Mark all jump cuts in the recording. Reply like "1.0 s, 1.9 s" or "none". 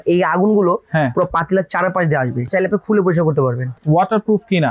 2.5 s, 3.7 s